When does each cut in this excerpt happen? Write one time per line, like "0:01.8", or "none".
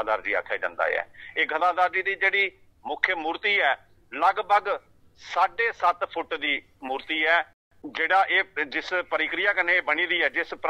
0:07.6